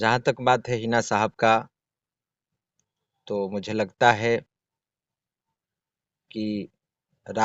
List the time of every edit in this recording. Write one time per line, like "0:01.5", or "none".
none